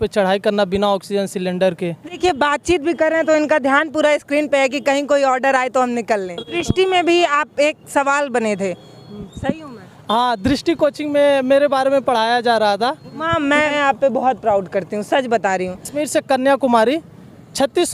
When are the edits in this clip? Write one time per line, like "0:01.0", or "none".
0:02.2
0:06.4
0:13.5
0:16.0